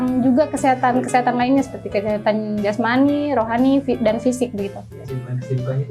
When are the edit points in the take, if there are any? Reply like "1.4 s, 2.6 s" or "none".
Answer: 5.0 s